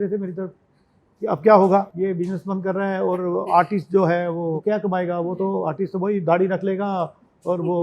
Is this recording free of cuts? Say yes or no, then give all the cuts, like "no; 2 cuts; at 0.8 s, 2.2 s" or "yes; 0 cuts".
no; 2 cuts; at 1.9 s, 4.6 s